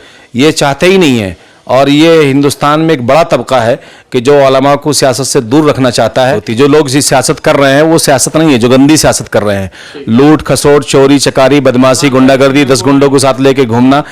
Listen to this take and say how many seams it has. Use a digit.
1